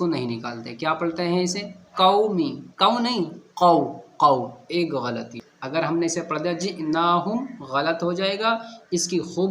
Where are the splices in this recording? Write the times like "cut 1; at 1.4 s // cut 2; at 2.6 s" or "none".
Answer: cut 1; at 5.4 s